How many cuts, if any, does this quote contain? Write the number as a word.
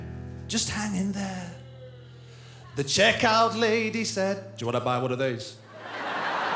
zero